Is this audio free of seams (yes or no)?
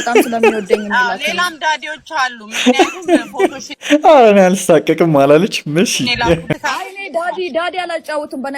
no